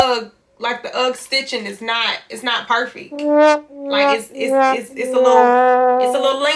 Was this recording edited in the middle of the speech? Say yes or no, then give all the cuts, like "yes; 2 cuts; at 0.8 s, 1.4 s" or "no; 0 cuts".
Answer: no; 0 cuts